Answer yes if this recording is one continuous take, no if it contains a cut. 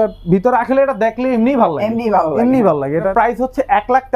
yes